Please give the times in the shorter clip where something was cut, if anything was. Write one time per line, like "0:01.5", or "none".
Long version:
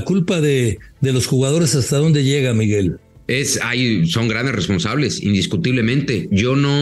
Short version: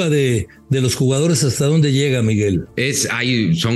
0:02.7